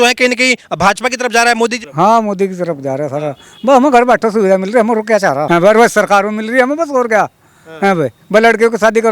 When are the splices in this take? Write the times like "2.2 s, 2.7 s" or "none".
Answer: 1.8 s, 5.4 s